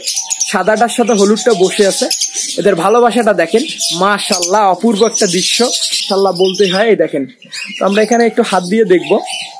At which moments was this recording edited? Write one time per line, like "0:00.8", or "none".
0:06.0